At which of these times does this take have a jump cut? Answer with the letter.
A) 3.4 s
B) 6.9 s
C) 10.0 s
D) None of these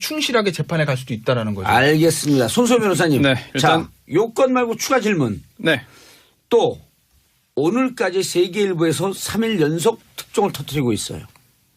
B